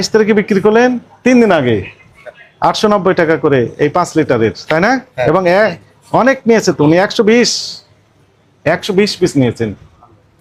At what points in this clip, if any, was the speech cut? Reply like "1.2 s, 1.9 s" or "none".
none